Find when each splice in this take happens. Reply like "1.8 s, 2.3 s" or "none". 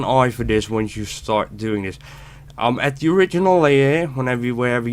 none